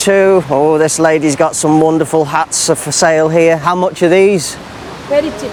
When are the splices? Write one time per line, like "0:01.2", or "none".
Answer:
none